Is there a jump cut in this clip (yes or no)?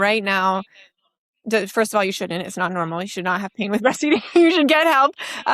no